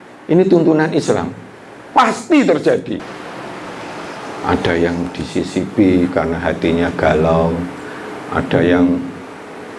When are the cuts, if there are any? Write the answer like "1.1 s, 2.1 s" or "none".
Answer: 3.1 s